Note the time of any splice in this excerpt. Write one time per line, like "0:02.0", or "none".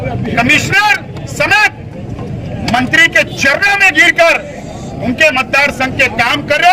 none